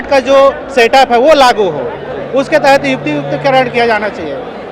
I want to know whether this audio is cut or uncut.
uncut